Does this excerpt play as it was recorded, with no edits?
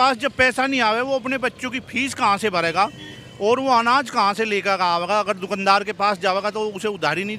yes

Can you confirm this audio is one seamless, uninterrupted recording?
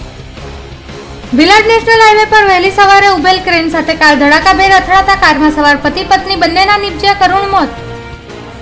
no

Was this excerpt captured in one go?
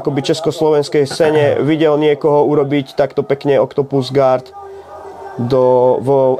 yes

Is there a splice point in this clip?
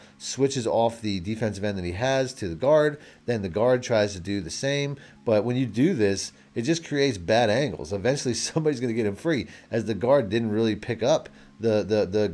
no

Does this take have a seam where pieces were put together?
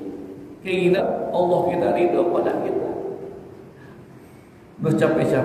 yes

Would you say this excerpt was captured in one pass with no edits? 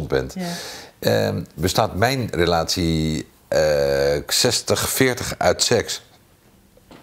yes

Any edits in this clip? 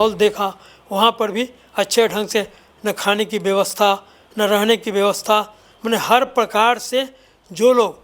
no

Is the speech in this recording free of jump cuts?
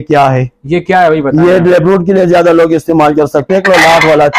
no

